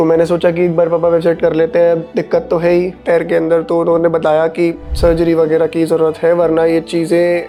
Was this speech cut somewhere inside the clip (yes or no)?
no